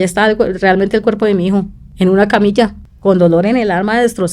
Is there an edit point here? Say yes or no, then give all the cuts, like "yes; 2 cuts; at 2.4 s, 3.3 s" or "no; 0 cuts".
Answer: yes; 2 cuts; at 1.8 s, 2.9 s